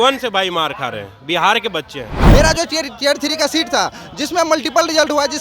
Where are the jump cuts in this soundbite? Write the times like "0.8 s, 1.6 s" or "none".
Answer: 2.2 s